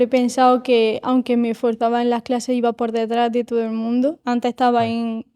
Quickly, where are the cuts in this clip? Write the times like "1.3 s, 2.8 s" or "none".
4.2 s